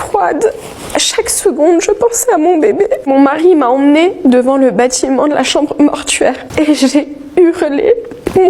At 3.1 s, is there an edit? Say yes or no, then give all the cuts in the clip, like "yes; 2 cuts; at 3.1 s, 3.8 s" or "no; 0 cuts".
yes; 1 cut; at 3.1 s